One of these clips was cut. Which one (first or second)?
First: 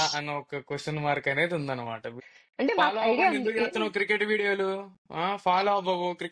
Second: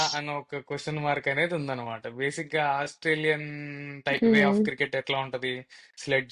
first